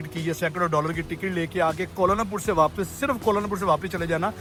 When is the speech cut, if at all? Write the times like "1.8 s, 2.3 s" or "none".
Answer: none